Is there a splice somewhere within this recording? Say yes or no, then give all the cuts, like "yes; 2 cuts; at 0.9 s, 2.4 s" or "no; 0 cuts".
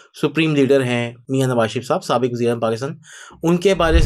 yes; 1 cut; at 1.2 s